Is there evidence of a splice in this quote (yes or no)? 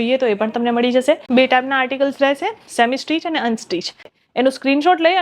yes